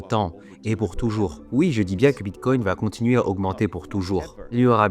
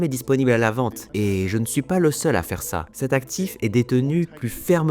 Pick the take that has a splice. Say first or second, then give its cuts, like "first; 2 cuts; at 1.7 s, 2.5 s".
second; 1 cut; at 1.0 s